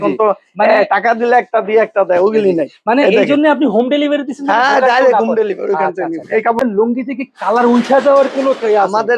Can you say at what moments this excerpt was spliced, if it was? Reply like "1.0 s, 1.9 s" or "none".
6.6 s